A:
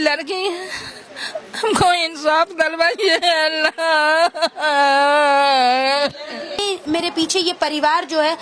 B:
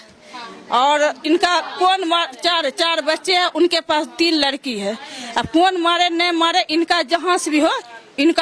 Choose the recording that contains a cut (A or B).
A